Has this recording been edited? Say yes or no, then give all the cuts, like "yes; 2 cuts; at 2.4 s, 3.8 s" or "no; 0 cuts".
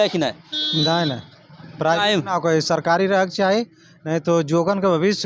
no; 0 cuts